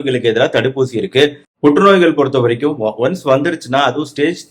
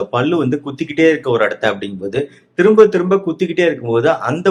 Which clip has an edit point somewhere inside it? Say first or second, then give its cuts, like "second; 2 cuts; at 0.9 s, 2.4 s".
first; 1 cut; at 1.5 s